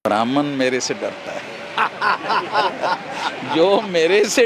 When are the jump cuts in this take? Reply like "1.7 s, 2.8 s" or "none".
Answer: none